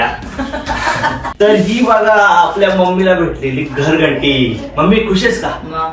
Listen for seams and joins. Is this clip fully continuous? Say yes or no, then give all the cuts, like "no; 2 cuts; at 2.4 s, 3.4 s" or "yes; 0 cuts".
no; 1 cut; at 1.3 s